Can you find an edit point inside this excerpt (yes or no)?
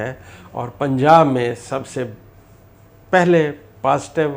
no